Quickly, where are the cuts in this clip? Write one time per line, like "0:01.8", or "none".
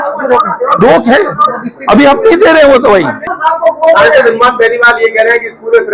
0:03.3